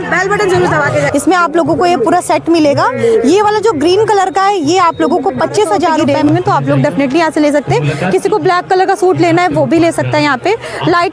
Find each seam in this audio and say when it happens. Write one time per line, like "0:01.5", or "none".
0:01.0
0:06.0